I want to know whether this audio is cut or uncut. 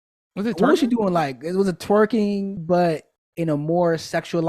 cut